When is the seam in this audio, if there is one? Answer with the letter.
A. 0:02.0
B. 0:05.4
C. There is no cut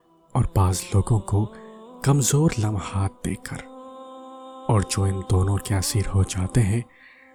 C